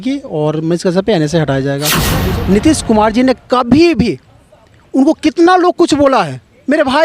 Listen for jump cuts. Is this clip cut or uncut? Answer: cut